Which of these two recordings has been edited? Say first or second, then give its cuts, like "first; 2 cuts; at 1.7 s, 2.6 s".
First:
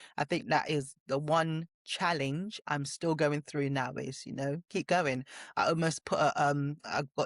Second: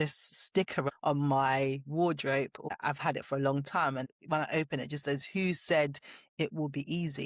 second; 3 cuts; at 0.9 s, 2.6 s, 4.1 s